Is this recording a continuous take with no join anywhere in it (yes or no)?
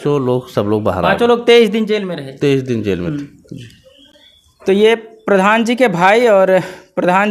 yes